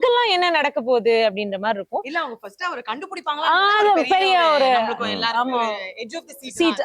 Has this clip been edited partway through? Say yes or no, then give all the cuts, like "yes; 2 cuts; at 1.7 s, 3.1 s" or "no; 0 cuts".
no; 0 cuts